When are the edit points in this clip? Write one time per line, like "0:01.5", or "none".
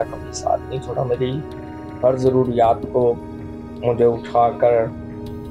none